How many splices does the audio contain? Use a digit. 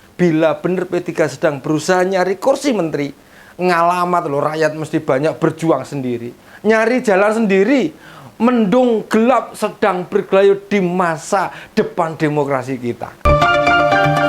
1